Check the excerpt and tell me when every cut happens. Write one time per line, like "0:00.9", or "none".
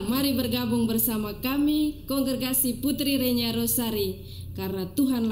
none